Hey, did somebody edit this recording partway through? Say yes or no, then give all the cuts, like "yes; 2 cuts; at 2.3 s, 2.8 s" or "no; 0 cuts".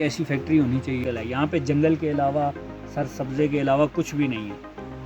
yes; 1 cut; at 1.0 s